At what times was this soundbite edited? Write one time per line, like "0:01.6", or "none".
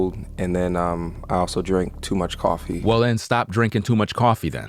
none